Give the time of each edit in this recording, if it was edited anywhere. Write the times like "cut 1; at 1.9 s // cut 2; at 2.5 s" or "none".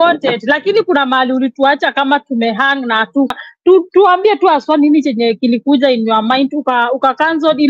cut 1; at 3.4 s